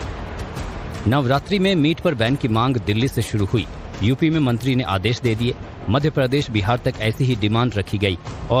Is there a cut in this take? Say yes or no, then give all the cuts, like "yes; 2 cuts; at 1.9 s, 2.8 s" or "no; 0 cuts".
no; 0 cuts